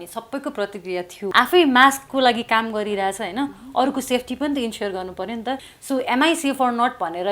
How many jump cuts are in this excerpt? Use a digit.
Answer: 2